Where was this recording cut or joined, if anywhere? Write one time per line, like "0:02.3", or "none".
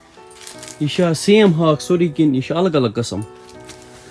none